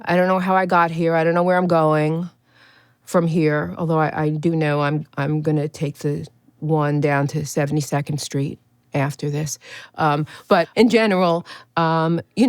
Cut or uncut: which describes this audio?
cut